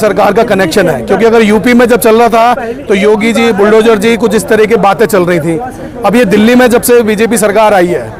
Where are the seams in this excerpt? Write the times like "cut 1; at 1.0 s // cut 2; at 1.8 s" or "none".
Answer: none